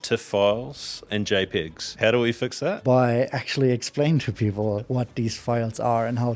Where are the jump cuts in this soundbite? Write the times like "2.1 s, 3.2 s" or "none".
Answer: 1.0 s, 1.9 s, 2.8 s, 4.8 s